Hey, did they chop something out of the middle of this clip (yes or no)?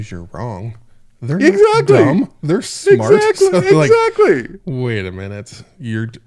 no